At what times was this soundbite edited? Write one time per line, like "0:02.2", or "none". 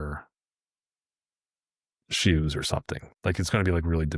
0:03.0